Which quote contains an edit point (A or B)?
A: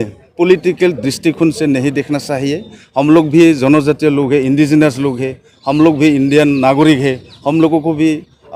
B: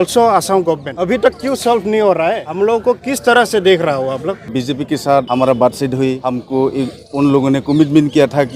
B